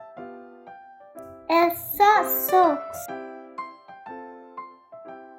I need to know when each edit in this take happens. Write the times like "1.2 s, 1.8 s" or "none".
1.4 s, 2.8 s